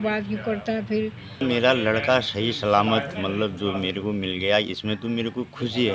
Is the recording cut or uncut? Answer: cut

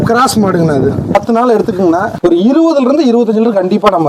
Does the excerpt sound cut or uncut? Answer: cut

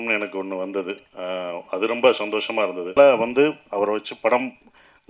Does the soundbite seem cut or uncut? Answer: cut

